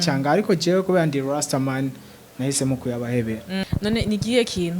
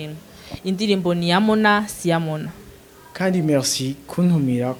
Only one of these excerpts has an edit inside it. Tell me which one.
first; 1 cut; at 3.6 s

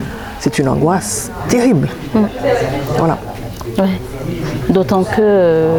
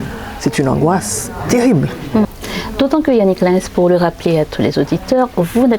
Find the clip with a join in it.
second; 1 cut; at 2.3 s

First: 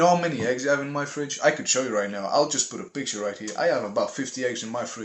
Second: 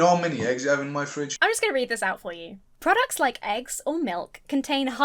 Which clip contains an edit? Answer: second; 1 cut; at 1.3 s

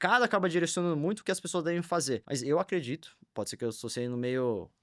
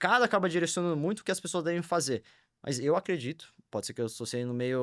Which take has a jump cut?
first; 1 cut; at 2.3 s

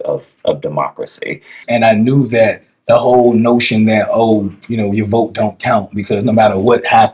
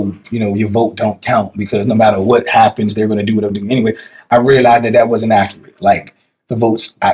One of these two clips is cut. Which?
first; 1 cut; at 1.6 s

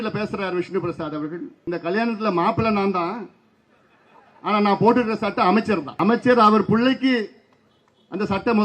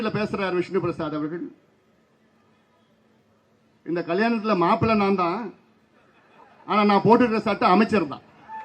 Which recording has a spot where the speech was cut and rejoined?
first; 2 cuts; at 1.6 s, 5.9 s

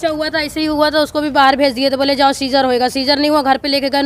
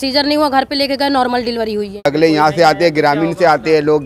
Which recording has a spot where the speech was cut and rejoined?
second; 1 cut; at 2.1 s

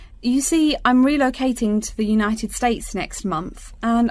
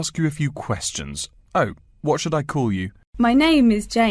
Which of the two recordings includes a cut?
second; 1 cut; at 3.0 s

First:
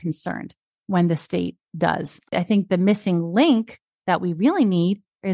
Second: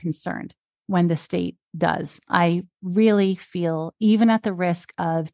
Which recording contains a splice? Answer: first; 1 cut; at 2.3 s

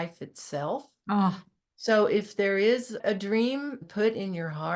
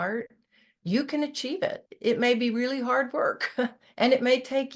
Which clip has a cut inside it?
first; 2 cuts; at 2.9 s, 3.8 s

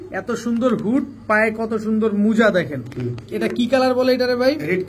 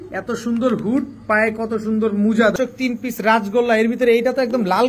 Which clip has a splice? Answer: second; 1 cut; at 2.5 s

